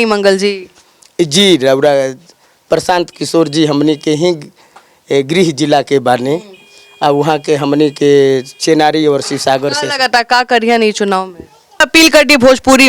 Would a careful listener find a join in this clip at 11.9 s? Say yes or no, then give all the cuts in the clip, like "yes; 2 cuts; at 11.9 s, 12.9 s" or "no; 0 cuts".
yes; 1 cut; at 11.9 s